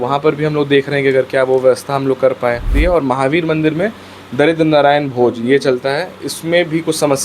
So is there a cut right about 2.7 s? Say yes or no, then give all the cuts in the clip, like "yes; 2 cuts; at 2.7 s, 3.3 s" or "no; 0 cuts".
yes; 1 cut; at 2.7 s